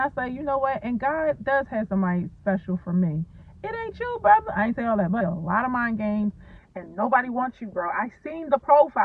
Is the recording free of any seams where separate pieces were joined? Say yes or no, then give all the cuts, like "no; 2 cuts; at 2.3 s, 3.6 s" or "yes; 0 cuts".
no; 1 cut; at 5.2 s